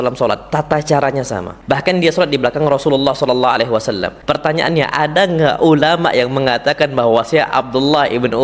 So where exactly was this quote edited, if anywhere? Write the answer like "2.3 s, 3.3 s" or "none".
1.5 s, 4.1 s